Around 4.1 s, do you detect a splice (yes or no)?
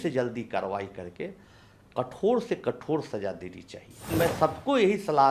yes